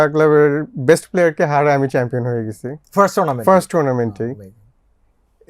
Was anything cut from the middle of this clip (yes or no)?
no